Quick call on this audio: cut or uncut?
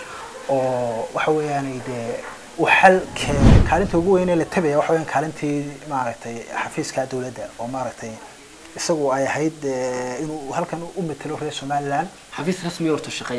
cut